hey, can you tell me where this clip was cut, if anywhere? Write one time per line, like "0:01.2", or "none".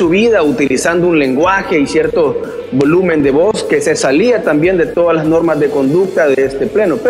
none